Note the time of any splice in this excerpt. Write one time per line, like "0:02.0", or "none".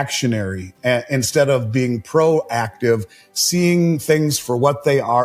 none